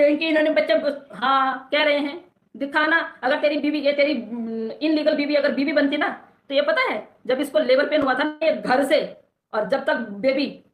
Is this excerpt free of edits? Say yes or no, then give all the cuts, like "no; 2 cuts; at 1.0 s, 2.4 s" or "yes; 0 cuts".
yes; 0 cuts